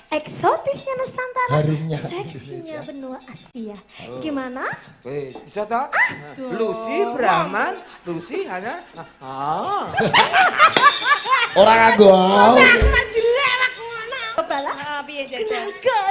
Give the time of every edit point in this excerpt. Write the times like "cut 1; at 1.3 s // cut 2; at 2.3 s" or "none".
cut 1; at 14.4 s